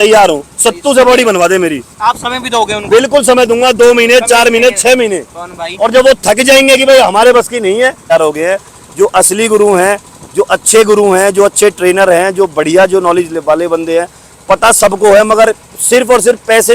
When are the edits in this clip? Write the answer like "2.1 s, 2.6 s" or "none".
8.0 s